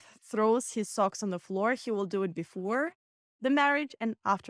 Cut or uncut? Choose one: uncut